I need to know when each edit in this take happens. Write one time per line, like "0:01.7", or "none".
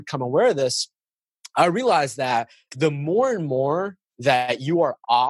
0:02.7